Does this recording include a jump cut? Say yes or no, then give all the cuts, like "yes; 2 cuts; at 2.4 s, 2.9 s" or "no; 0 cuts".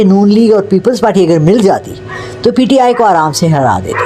no; 0 cuts